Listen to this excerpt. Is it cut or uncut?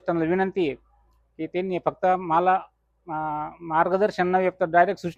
uncut